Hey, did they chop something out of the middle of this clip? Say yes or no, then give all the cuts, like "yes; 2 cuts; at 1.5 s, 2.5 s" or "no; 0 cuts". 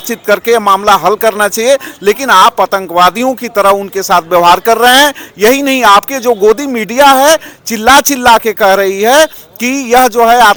no; 0 cuts